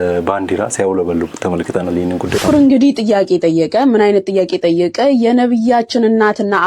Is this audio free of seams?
no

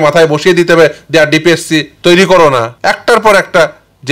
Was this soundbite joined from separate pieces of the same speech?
yes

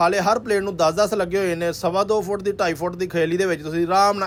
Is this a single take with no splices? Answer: yes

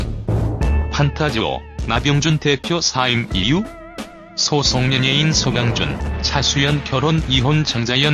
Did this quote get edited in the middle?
no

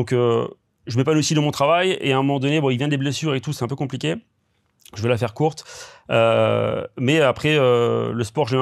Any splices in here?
no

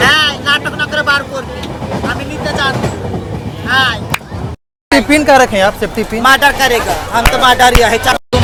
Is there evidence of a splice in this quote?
no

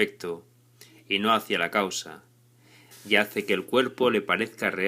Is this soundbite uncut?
no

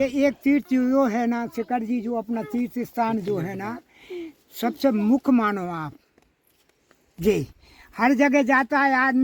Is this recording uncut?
yes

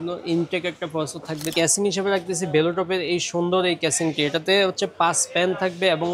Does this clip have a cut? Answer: yes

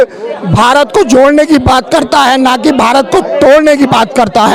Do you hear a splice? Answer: no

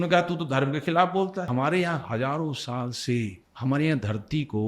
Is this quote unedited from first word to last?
no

